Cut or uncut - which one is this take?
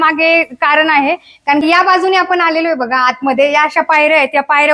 cut